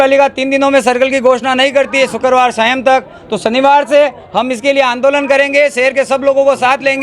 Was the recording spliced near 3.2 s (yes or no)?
no